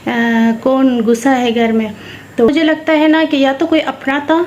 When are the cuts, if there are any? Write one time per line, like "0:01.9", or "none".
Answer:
0:02.5